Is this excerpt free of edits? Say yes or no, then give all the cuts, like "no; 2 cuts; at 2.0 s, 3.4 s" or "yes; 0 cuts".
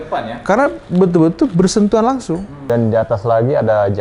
no; 1 cut; at 2.7 s